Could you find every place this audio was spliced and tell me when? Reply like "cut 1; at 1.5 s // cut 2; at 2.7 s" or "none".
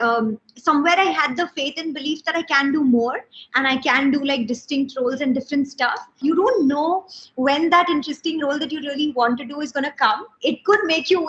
cut 1; at 6.2 s